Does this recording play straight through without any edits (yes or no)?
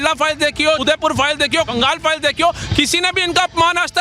no